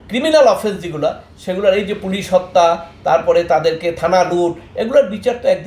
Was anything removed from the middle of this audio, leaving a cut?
no; 0 cuts

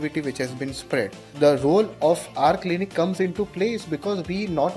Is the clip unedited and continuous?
no; 1 cut; at 1.2 s

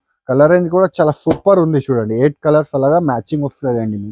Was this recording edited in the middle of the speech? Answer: no; 0 cuts

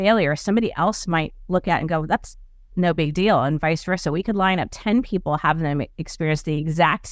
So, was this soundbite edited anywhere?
no; 0 cuts

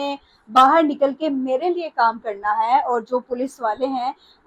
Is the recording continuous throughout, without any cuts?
yes; 0 cuts

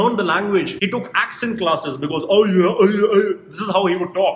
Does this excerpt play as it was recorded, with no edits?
yes; 0 cuts

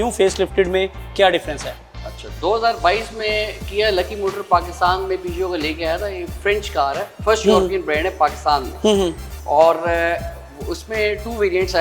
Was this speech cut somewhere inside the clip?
no; 0 cuts

